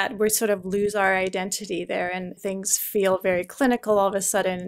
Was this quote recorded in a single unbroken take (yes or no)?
no